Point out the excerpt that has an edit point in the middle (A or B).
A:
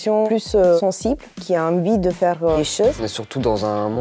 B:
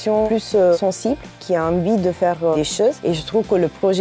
A